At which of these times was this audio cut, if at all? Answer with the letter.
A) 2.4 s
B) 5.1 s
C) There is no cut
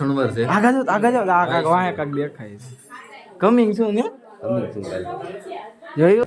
B